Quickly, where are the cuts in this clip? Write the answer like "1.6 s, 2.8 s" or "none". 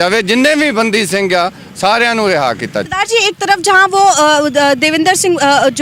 2.8 s